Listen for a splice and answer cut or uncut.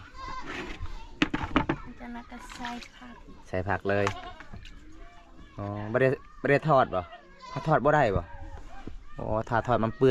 uncut